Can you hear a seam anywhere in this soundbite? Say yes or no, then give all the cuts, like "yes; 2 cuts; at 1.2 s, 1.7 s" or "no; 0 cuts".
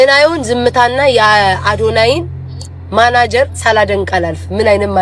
no; 0 cuts